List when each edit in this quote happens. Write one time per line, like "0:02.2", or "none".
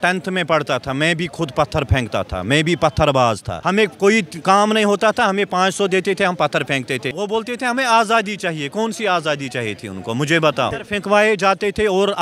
0:03.5
0:07.1
0:10.8